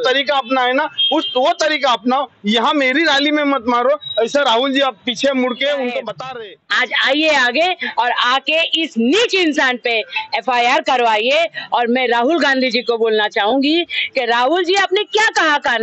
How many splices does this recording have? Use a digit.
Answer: 1